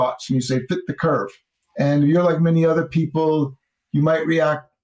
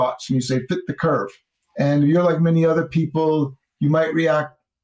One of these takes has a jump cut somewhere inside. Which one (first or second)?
second